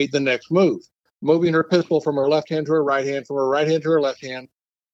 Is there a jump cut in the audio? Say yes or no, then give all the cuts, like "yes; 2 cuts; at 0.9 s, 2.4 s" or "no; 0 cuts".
yes; 1 cut; at 1.0 s